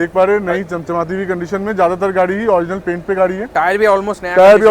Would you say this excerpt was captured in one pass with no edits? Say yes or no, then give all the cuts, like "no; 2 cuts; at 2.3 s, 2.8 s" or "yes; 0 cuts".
yes; 0 cuts